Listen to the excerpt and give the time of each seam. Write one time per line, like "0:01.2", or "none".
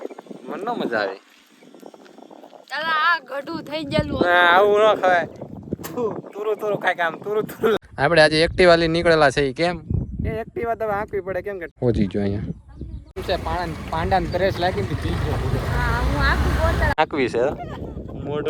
0:07.8
0:11.7
0:13.2
0:17.0